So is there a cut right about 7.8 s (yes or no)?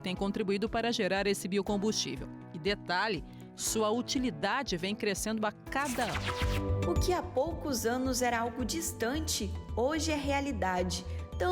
no